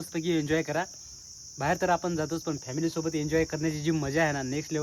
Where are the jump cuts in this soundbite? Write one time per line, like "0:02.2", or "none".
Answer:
none